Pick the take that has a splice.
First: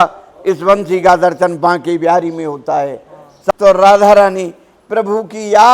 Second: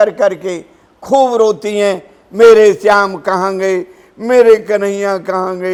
first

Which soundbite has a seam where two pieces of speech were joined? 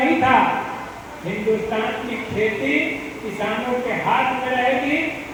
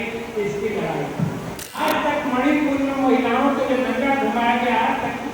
second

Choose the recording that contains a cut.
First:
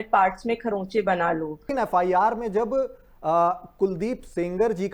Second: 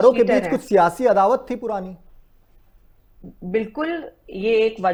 first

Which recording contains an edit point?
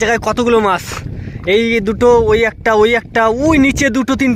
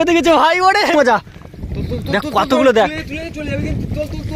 second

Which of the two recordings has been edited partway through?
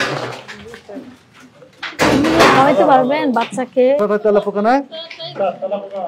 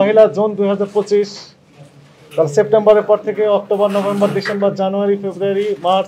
first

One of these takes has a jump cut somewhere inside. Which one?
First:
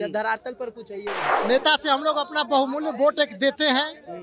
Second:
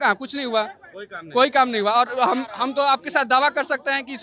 first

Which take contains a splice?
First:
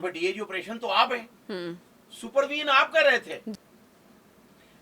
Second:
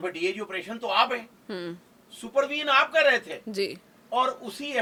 first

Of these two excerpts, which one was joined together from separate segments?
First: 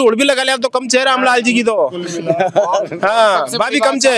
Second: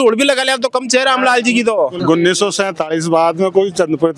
second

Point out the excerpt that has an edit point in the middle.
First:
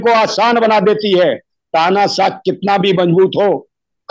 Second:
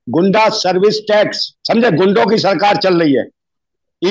second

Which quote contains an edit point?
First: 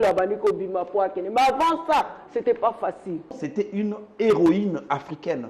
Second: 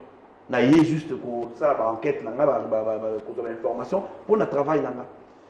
first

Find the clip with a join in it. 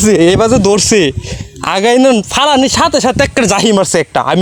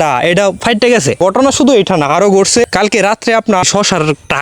second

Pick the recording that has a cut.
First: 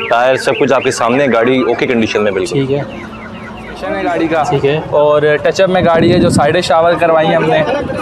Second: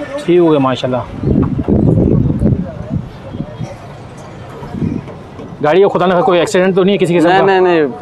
first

